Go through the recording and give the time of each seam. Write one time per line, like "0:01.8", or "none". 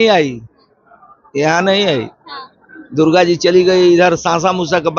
none